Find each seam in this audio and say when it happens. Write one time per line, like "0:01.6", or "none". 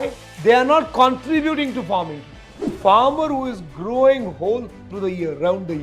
0:02.8
0:04.8

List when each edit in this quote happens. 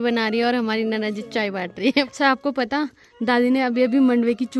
0:02.1

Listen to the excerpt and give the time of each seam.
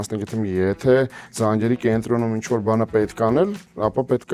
none

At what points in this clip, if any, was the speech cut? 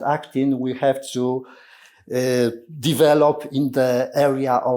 none

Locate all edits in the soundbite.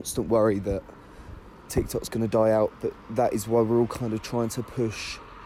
none

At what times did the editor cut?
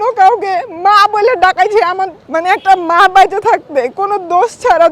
0:02.2

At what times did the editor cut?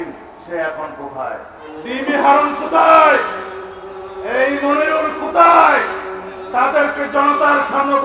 0:01.6

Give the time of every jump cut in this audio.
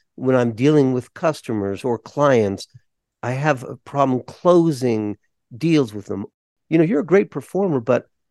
0:06.4

